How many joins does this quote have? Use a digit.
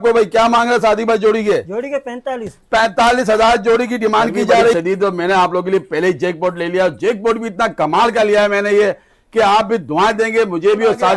1